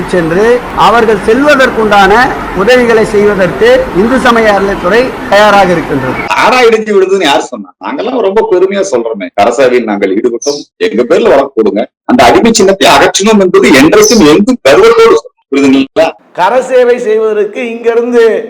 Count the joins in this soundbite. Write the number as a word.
three